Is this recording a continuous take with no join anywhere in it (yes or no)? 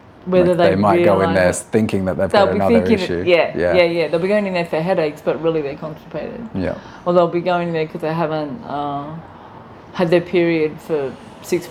yes